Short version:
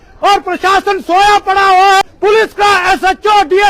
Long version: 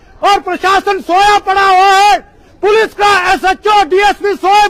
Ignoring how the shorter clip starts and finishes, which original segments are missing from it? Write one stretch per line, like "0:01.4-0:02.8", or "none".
0:02.0-0:02.4